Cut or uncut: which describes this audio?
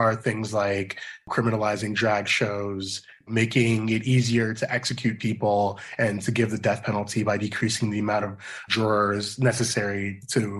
uncut